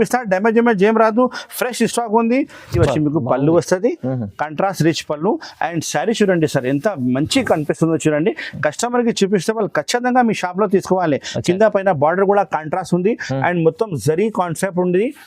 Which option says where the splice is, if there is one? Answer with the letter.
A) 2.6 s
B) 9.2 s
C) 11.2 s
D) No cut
A